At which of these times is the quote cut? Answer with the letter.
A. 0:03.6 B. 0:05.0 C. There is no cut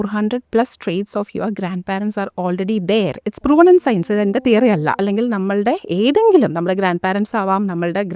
B